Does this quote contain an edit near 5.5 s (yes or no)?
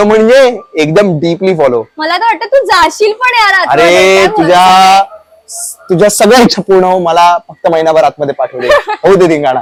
no